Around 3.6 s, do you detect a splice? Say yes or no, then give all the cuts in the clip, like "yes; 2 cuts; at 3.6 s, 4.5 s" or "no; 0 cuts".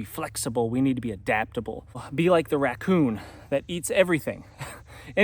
no; 1 cut; at 2.1 s